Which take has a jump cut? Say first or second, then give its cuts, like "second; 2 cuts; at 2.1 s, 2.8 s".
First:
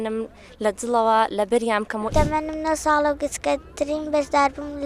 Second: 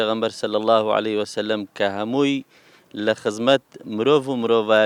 first; 1 cut; at 2.1 s